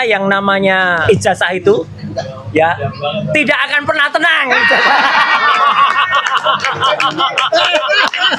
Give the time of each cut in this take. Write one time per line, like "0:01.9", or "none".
0:01.0